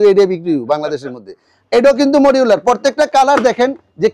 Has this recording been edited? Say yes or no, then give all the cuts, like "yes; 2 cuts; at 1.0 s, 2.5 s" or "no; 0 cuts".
yes; 1 cut; at 1.5 s